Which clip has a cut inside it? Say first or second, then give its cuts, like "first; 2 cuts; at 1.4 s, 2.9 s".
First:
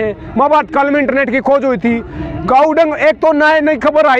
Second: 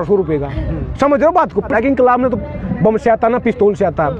second; 1 cut; at 1.7 s